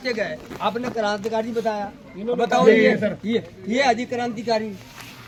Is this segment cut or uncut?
uncut